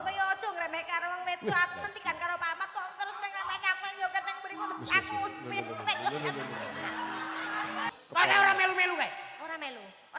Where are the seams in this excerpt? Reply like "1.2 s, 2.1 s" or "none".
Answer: 7.9 s